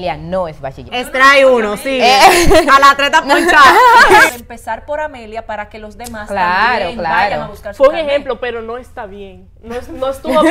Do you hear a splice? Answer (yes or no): yes